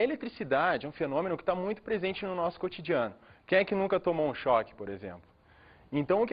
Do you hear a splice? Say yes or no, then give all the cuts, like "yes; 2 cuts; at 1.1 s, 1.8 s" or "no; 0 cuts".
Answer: yes; 1 cut; at 4.9 s